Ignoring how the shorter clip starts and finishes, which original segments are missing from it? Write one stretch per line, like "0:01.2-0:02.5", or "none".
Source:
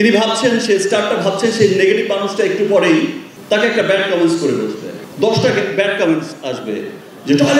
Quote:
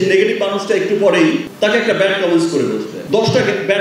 0:03.2-0:03.4
0:04.8-0:05.0